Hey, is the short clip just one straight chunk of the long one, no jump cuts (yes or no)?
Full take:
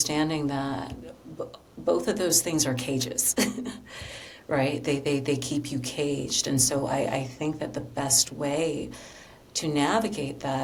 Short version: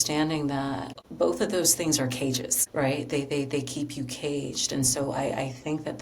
no